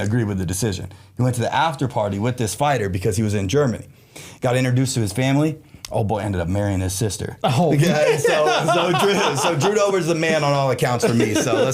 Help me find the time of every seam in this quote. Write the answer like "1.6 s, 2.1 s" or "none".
none